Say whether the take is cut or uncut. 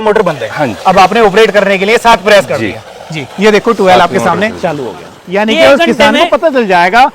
cut